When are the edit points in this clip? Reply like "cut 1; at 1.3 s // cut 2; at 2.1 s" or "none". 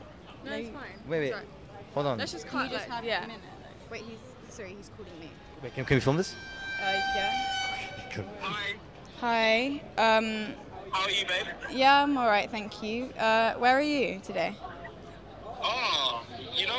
none